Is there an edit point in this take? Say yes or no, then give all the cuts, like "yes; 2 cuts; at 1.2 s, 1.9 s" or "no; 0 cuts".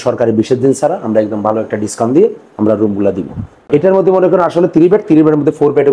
yes; 1 cut; at 3.6 s